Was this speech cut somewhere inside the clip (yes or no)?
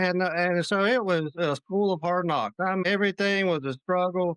yes